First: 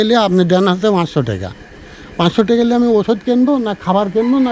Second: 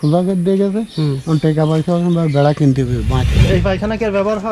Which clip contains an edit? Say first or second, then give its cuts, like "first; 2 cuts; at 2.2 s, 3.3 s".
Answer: second; 1 cut; at 3.4 s